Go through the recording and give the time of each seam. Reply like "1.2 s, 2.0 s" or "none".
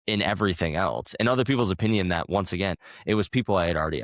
2.8 s